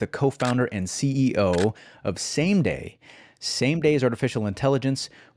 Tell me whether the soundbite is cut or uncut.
uncut